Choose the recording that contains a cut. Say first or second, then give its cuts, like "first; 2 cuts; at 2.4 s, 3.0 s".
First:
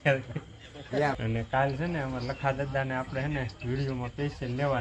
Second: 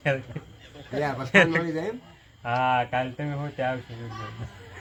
first; 1 cut; at 1.2 s